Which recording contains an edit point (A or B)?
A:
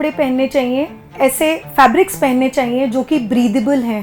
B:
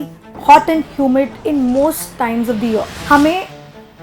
B